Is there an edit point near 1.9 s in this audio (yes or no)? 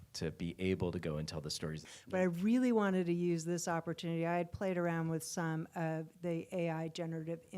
yes